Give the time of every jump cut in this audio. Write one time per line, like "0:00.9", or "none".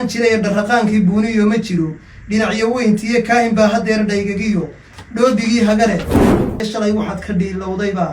0:06.3